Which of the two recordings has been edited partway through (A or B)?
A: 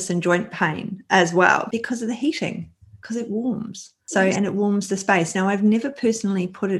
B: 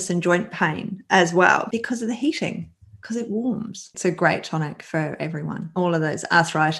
B